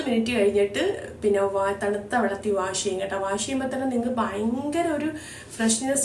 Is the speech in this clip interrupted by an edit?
no; 0 cuts

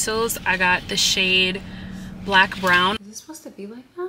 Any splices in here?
yes; 1 cut; at 3.0 s

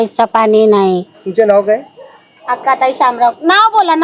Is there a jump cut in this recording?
no; 0 cuts

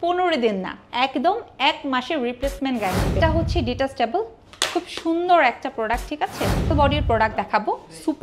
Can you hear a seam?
yes; 2 cuts; at 3.2 s, 6.7 s

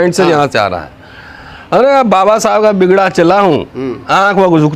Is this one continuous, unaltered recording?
yes; 0 cuts

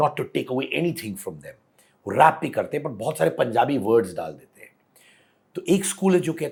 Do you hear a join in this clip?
no; 0 cuts

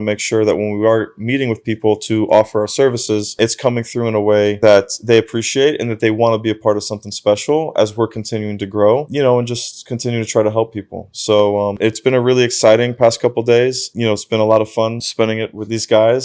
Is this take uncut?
yes; 0 cuts

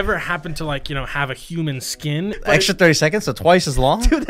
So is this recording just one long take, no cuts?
no; 1 cut; at 2.4 s

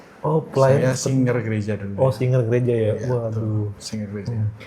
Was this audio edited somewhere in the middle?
no; 0 cuts

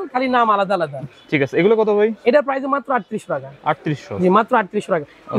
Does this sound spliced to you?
no; 0 cuts

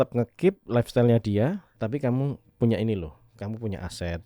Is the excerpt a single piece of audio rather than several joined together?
no; 1 cut; at 1.7 s

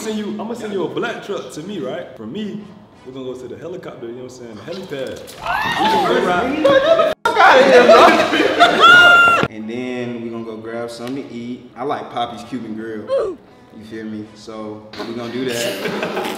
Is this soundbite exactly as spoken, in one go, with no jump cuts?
no; 3 cuts; at 2.1 s, 9.5 s, 11.7 s

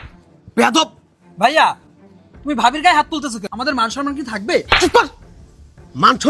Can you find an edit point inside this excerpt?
yes; 1 cut; at 3.5 s

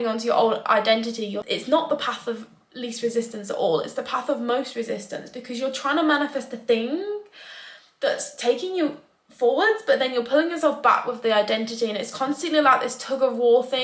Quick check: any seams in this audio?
yes; 1 cut; at 1.4 s

